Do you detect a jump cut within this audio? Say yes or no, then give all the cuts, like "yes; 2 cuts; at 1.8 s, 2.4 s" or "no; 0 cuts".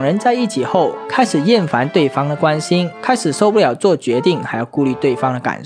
no; 0 cuts